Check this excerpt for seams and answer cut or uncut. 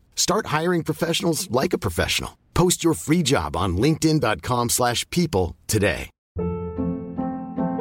cut